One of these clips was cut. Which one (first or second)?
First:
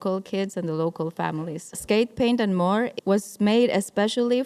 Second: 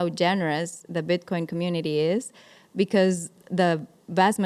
first